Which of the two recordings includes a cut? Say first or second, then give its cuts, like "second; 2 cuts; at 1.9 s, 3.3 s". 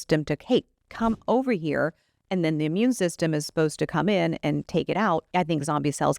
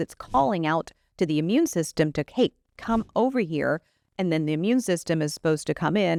first; 1 cut; at 5.3 s